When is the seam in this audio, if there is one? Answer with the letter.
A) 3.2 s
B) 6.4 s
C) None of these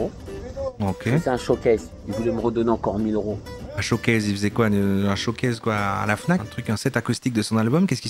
B